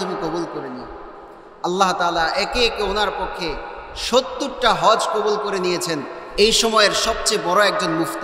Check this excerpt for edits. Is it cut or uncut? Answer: cut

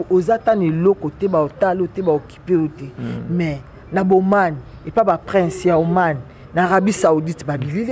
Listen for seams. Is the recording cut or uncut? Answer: uncut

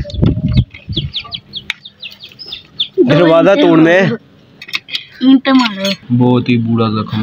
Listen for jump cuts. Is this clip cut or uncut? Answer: cut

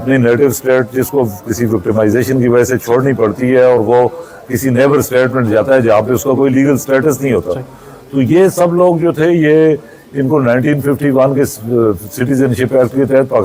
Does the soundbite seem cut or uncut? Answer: uncut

